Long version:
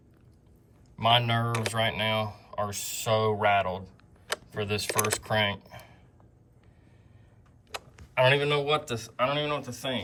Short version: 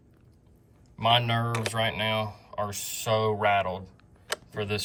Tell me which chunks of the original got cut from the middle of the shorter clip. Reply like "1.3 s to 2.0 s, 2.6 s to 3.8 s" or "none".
none